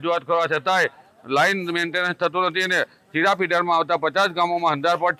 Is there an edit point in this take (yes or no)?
no